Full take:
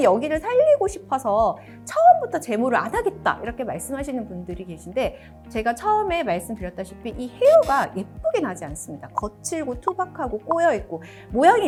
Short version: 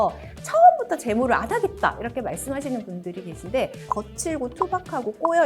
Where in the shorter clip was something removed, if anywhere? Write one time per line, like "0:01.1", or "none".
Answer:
0:03.8